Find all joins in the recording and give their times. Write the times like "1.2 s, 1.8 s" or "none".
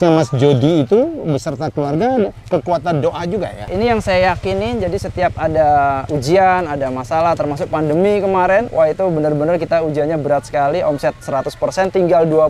3.7 s, 6.0 s, 8.7 s